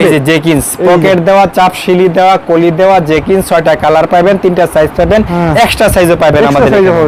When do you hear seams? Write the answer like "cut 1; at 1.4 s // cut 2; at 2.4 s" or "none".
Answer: none